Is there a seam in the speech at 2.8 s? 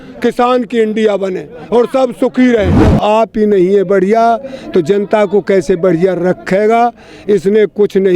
yes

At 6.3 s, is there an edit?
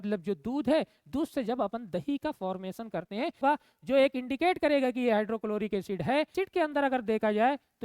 yes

